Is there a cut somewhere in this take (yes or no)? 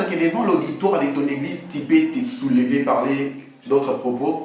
no